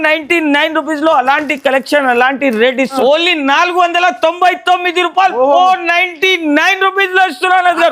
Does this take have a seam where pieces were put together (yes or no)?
yes